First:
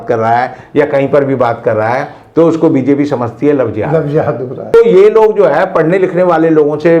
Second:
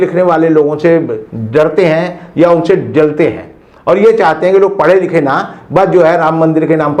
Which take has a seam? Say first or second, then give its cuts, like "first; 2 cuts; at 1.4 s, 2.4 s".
first; 1 cut; at 4.7 s